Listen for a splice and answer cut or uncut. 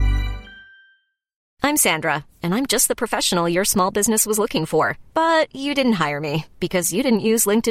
cut